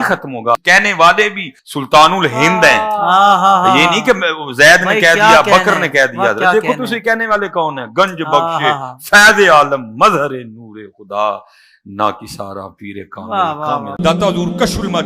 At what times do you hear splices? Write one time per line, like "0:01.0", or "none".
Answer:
0:13.9